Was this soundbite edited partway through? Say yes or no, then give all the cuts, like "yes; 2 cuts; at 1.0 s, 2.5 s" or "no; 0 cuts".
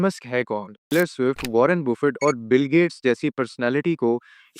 yes; 1 cut; at 0.9 s